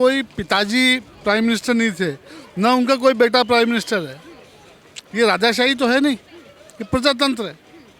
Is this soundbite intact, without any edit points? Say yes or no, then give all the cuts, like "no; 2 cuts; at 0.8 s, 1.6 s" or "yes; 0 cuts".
yes; 0 cuts